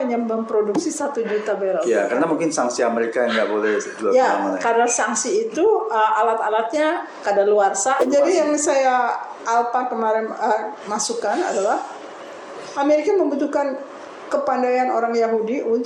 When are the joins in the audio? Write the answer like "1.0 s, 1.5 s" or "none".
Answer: 8.0 s